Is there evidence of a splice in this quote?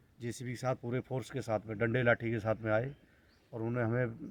no; 0 cuts

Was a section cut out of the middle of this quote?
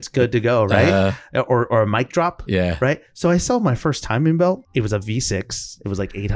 yes; 1 cut; at 4.6 s

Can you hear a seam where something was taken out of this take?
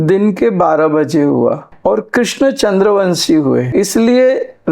yes; 2 cuts; at 1.7 s, 3.7 s

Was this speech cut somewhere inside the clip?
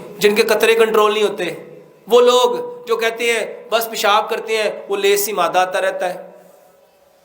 no; 0 cuts

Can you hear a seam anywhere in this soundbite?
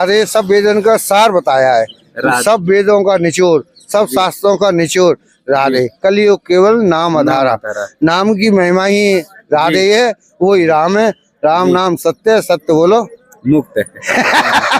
no; 0 cuts

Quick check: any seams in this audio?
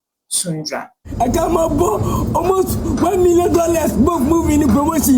yes; 1 cut; at 1.0 s

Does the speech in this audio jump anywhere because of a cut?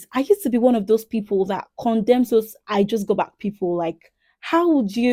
no; 0 cuts

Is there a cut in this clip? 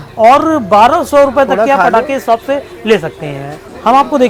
no; 0 cuts

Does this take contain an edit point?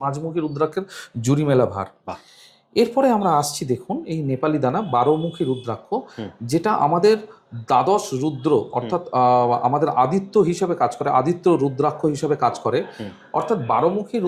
no; 0 cuts

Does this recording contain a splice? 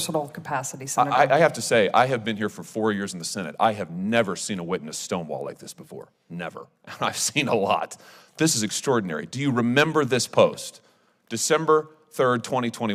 no; 0 cuts

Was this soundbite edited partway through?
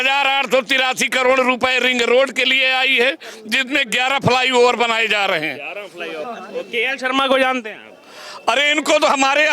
yes; 1 cut; at 6.2 s

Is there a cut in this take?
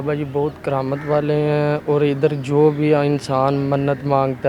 no; 0 cuts

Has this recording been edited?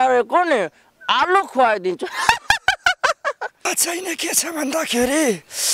yes; 1 cut; at 3.6 s

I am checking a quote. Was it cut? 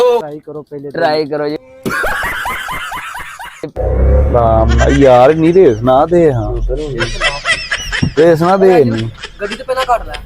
yes; 1 cut; at 3.8 s

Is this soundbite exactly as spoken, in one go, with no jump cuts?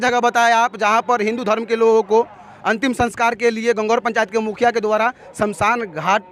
yes; 0 cuts

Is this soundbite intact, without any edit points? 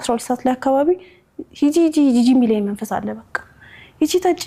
yes; 0 cuts

